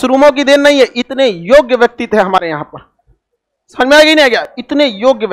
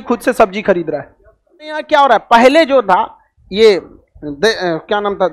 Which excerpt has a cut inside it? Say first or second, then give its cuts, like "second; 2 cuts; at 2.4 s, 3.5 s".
second; 1 cut; at 1.8 s